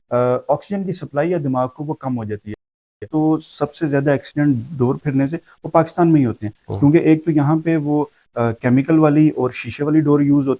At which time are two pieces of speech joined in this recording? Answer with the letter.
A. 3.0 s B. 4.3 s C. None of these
A